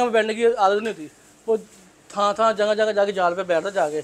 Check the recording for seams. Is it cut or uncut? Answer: uncut